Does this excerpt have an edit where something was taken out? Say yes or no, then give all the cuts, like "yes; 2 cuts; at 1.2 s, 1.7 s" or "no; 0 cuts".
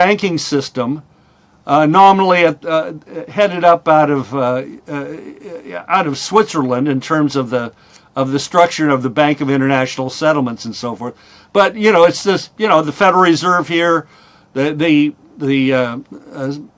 no; 0 cuts